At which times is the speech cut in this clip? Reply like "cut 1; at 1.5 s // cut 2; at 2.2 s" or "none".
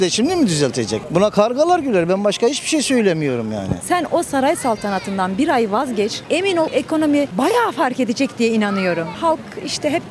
cut 1; at 3.8 s // cut 2; at 6.7 s // cut 3; at 9.1 s

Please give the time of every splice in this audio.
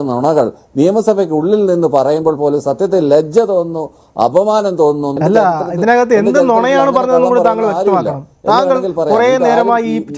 cut 1; at 5.1 s

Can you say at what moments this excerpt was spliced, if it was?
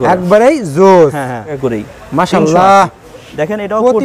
cut 1; at 1.6 s

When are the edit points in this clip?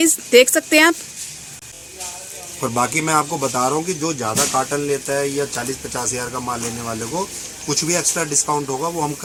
none

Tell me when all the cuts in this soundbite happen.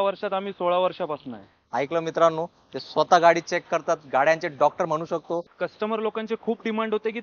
cut 1; at 5.5 s

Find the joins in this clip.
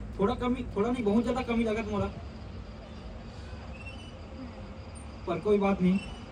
none

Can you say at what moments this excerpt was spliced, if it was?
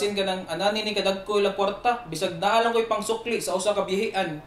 none

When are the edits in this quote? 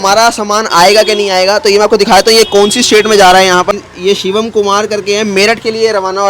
cut 1; at 3.7 s

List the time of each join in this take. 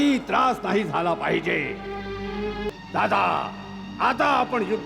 cut 1; at 2.7 s

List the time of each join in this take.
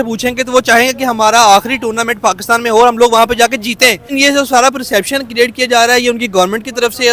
cut 1; at 4.1 s

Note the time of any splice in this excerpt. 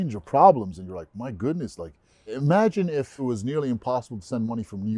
cut 1; at 2.2 s // cut 2; at 3.2 s

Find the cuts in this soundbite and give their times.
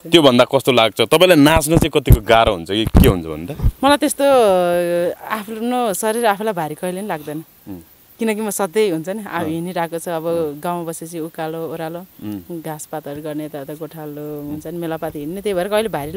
none

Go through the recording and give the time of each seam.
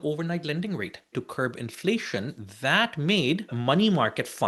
cut 1; at 1.1 s // cut 2; at 3.5 s

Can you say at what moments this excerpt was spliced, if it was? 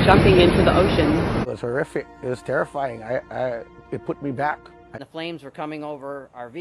cut 1; at 1.5 s // cut 2; at 5.0 s

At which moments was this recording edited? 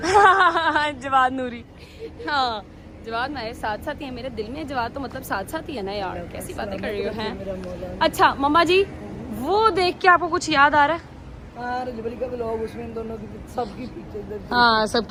none

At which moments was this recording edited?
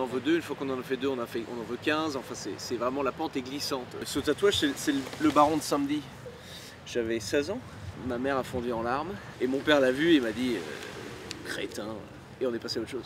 cut 1; at 4.0 s // cut 2; at 7.9 s // cut 3; at 9.2 s // cut 4; at 12.2 s

